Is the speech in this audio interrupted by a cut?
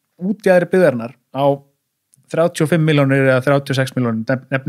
no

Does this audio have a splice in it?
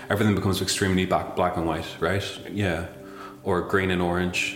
no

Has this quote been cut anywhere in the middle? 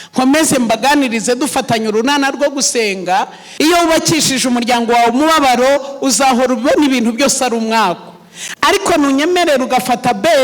yes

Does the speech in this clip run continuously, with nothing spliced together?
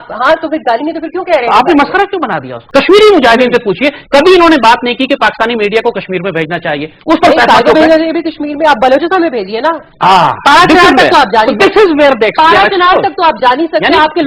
no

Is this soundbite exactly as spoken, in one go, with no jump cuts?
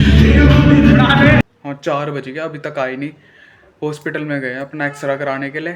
no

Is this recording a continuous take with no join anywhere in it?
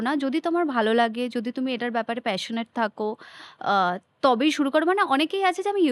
yes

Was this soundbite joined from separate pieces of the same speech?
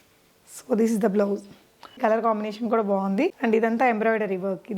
yes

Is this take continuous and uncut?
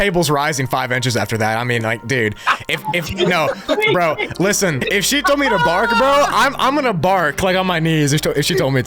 no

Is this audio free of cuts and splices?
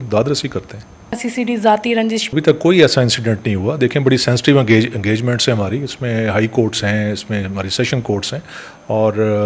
no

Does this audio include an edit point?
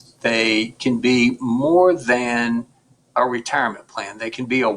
no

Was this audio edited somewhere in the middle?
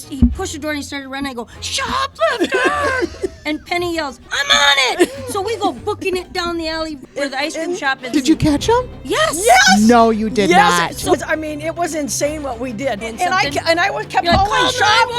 yes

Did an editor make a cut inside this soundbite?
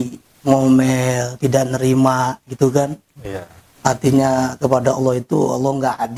no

